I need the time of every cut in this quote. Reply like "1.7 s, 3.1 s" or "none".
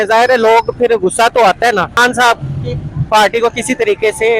1.9 s